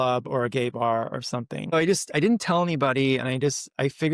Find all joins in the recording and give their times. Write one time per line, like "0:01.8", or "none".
0:01.7